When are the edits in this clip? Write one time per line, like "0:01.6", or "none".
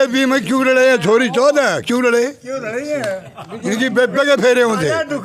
none